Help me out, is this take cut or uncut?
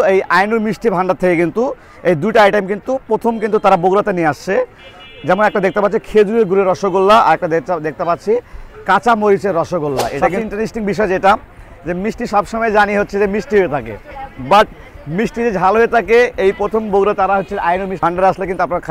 cut